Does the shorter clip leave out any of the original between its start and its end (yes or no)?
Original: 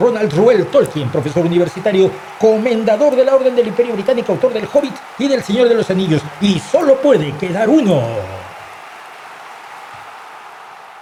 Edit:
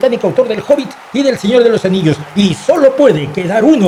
no